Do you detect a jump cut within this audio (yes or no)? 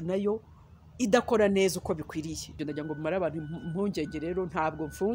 yes